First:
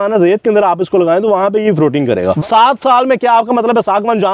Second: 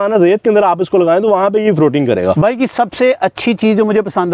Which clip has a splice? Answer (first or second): first